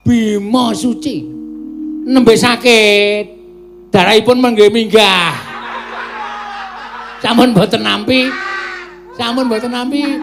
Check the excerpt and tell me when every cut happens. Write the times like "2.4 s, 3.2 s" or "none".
none